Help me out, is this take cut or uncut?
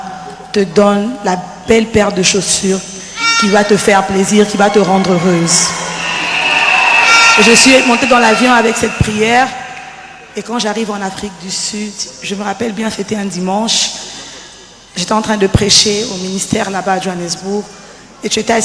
uncut